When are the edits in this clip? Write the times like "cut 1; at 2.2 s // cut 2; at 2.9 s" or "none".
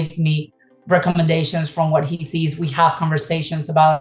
none